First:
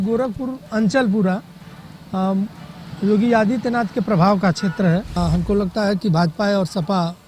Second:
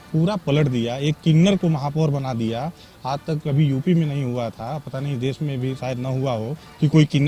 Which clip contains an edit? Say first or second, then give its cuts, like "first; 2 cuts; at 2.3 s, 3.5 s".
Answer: first; 1 cut; at 5.1 s